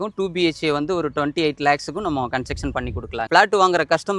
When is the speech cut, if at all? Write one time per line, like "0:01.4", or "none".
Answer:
0:03.2

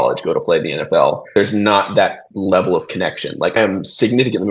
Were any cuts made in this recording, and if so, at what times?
0:01.3
0:03.6

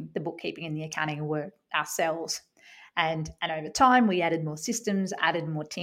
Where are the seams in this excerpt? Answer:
none

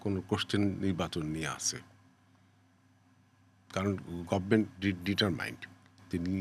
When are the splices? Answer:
none

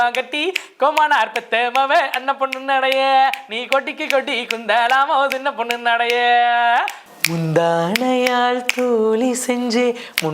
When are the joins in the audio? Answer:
0:07.0

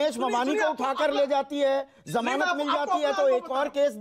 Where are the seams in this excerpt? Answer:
0:02.0

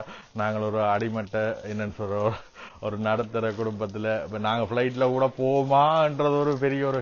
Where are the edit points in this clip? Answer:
none

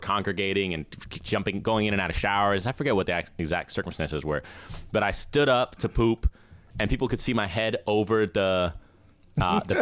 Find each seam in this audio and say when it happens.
none

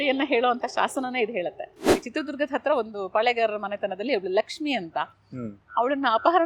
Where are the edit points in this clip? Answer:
0:01.9

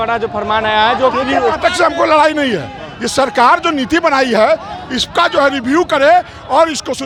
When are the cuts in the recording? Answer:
none

